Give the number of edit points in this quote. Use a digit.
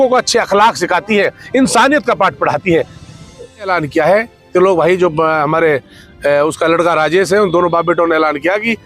1